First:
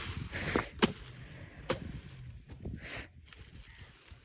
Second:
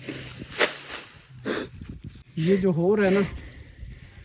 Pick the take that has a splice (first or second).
second